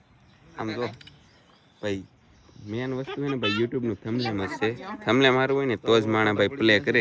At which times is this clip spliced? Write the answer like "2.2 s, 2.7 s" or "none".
none